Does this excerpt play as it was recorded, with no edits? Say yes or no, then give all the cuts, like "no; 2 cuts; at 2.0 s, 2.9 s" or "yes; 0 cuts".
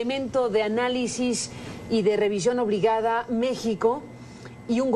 no; 1 cut; at 1.6 s